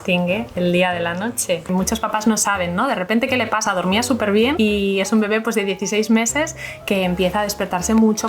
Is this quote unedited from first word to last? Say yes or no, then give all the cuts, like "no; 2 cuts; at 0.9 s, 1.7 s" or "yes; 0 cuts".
no; 2 cuts; at 1.7 s, 4.6 s